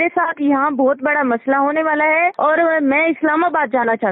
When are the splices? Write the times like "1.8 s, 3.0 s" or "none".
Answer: 2.3 s

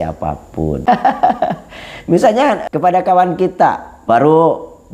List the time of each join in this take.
0.8 s, 2.6 s, 3.9 s

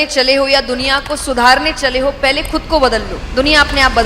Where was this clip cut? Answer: 3.2 s

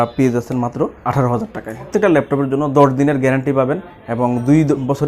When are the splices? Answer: 1.0 s, 1.9 s

